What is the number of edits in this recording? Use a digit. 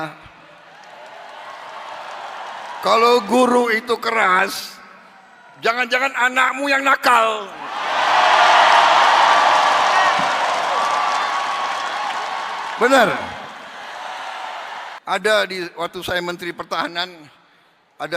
1